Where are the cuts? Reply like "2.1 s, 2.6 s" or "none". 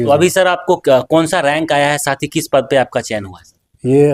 none